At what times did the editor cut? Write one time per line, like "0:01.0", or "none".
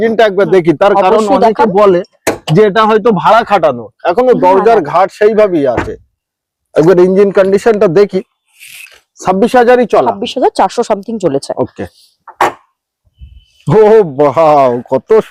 none